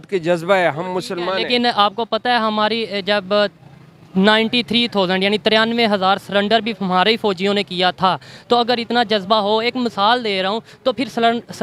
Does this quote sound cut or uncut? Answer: uncut